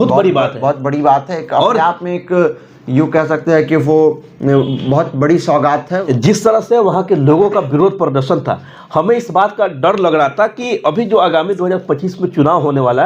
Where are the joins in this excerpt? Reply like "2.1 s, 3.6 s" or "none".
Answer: 6.0 s